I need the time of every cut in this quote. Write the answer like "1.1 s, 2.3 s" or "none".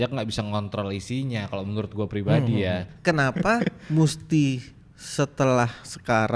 2.9 s